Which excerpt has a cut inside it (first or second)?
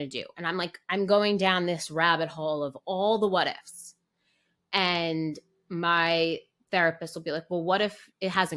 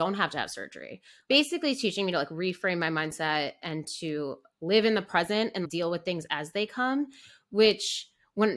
second